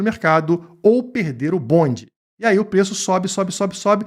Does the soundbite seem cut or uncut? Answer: cut